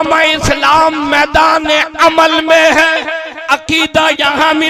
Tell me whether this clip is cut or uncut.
cut